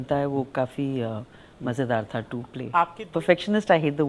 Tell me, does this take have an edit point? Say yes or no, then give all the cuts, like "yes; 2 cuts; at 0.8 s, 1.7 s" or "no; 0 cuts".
yes; 1 cut; at 2.7 s